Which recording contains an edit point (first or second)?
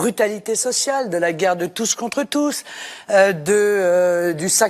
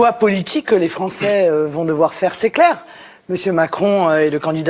second